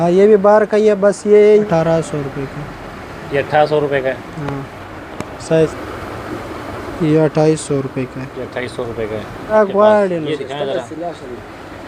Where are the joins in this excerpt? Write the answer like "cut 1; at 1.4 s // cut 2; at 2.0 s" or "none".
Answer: cut 1; at 1.6 s // cut 2; at 5.7 s // cut 3; at 9.5 s